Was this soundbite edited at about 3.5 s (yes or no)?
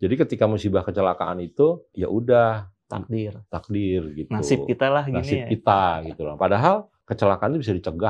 no